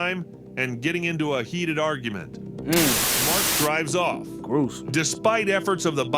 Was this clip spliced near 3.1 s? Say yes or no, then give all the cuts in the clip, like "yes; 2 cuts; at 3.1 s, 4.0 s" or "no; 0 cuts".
yes; 1 cut; at 3.1 s